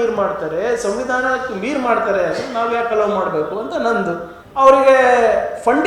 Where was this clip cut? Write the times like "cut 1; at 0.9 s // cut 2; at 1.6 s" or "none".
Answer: cut 1; at 4.3 s

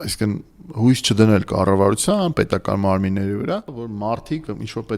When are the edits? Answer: cut 1; at 3.8 s

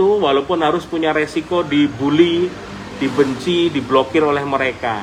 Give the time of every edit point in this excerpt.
none

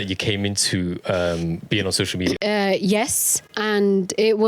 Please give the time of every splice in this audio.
cut 1; at 2.4 s // cut 2; at 3.5 s

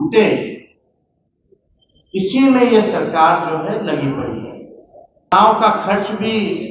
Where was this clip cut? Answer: cut 1; at 5.3 s

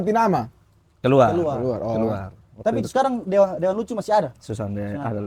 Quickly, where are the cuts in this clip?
none

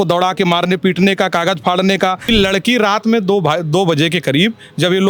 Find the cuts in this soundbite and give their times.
cut 1; at 2.2 s

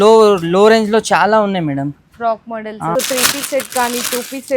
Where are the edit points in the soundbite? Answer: cut 1; at 2.9 s

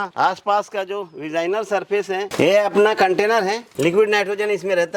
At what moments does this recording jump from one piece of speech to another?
cut 1; at 2.3 s

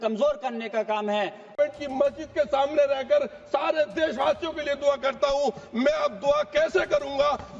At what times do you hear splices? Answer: cut 1; at 1.6 s

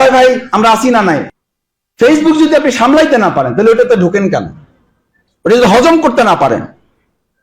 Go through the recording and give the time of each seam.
cut 1; at 1.3 s

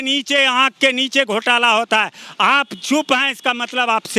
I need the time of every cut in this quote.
none

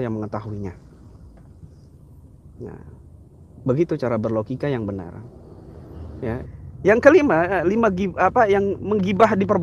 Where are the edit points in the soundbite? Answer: cut 1; at 6.4 s

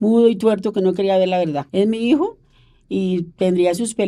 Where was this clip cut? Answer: cut 1; at 1.7 s

